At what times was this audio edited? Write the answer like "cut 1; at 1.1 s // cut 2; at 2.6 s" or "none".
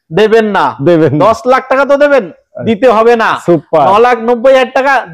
none